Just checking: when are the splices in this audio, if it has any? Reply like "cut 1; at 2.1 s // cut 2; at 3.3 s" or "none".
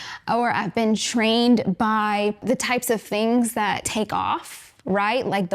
cut 1; at 3.8 s